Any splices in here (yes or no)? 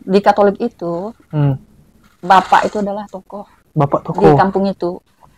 no